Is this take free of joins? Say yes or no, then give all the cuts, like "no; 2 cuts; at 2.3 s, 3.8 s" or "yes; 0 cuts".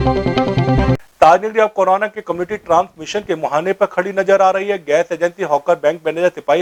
yes; 0 cuts